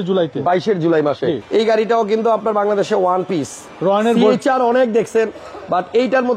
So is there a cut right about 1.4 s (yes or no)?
yes